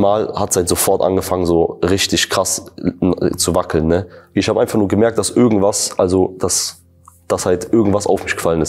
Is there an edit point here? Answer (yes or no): yes